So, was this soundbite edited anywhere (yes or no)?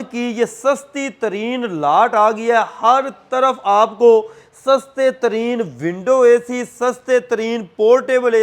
no